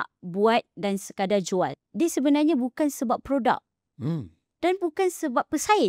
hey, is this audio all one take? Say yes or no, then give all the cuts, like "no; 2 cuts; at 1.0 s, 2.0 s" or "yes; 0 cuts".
no; 1 cut; at 1.8 s